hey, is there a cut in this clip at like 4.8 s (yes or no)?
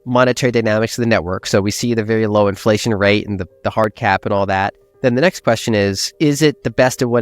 no